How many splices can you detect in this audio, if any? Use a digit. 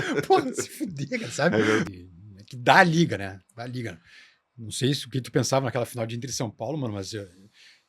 1